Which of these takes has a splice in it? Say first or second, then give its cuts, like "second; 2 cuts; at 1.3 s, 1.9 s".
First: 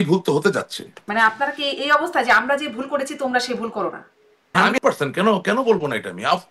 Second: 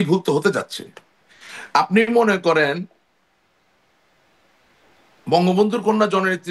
first; 2 cuts; at 1.0 s, 4.7 s